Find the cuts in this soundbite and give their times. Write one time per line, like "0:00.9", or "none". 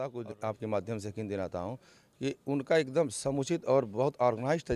none